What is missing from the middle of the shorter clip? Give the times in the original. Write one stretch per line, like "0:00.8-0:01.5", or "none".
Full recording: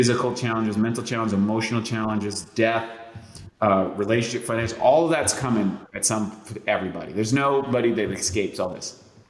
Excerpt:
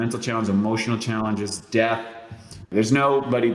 0:03.5-0:07.0